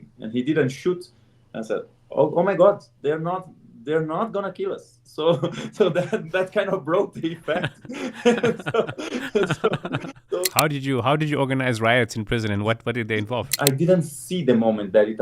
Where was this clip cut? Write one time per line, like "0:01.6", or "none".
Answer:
0:10.5
0:13.5